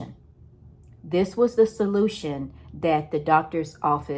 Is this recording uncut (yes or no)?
yes